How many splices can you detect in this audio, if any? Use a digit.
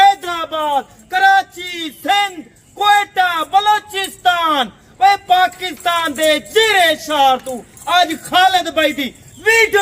0